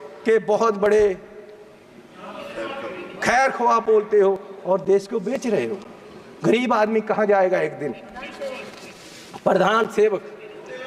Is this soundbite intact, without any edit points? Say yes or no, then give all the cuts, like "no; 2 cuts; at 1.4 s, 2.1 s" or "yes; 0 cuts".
yes; 0 cuts